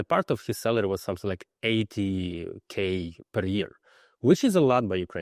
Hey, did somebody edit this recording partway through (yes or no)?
no